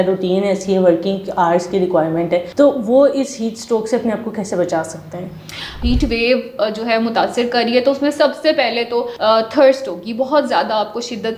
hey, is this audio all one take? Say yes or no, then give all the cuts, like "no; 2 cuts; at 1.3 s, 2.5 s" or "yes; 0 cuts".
no; 3 cuts; at 2.5 s, 5.7 s, 9.1 s